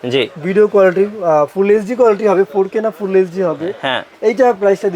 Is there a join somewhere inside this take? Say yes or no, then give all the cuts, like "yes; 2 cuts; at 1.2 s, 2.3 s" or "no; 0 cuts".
no; 0 cuts